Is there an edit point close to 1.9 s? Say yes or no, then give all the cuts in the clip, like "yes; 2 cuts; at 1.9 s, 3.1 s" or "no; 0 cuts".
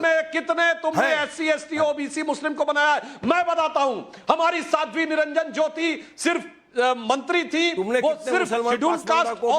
no; 1 cut; at 3.1 s